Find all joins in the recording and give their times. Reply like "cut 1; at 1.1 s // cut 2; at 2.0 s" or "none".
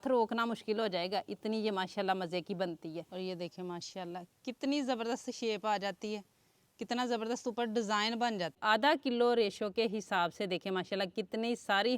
cut 1; at 3.1 s // cut 2; at 8.6 s